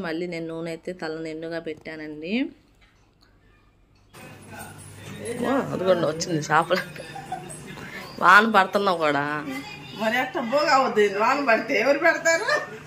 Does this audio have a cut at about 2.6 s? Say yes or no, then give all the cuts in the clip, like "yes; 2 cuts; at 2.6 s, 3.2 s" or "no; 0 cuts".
no; 0 cuts